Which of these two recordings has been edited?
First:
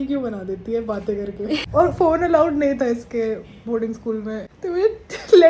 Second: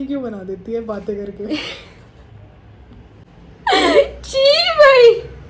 first; 2 cuts; at 1.7 s, 4.5 s

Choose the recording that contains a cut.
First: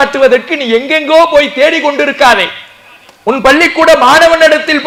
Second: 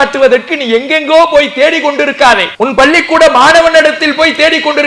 second; 1 cut; at 2.5 s

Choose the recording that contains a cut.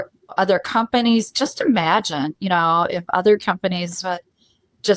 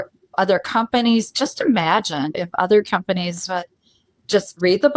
second; 1 cut; at 2.4 s

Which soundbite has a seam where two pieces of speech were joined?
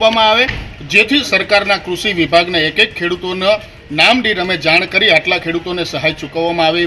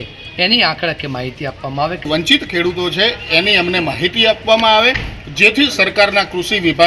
second; 1 cut; at 2.1 s

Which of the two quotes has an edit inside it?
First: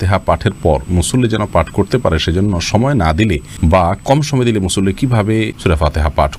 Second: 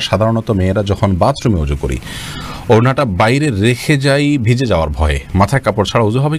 first; 2 cuts; at 3.5 s, 5.5 s

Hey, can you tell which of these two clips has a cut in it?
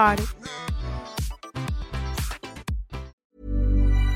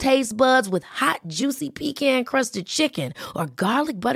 first; 1 cut; at 3.3 s

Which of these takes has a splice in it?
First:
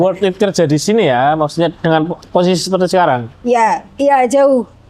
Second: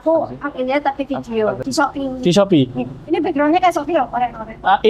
second; 1 cut; at 1.6 s

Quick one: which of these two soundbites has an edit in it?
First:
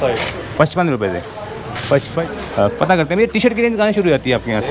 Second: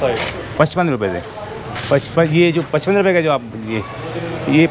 first; 1 cut; at 2.2 s

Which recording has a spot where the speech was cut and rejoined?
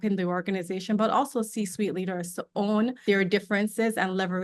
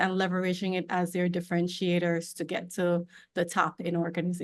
first; 1 cut; at 3.0 s

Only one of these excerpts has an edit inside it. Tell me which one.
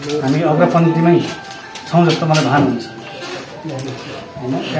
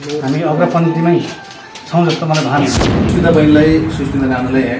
second; 1 cut; at 3.0 s

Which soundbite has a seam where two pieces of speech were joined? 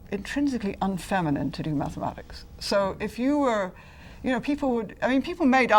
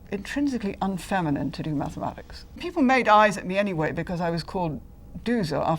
second; 1 cut; at 2.6 s

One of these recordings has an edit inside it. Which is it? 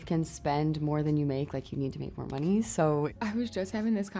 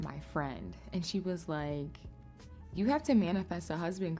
first; 1 cut; at 3.1 s

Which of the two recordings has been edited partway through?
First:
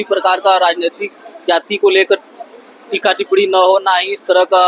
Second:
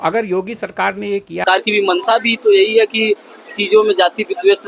second; 1 cut; at 1.4 s

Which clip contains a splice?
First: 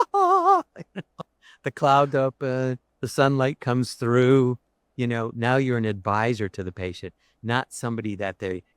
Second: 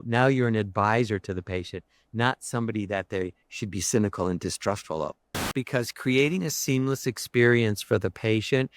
second; 1 cut; at 5.5 s

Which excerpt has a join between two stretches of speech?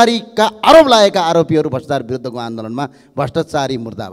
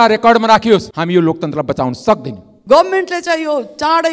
second; 2 cuts; at 0.9 s, 2.5 s

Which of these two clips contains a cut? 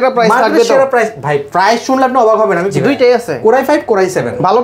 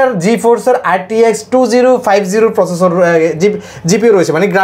first; 1 cut; at 2.6 s

